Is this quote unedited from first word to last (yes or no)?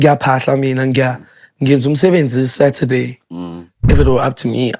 no